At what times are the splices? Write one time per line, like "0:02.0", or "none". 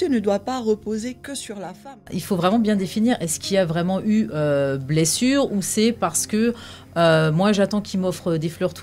0:02.1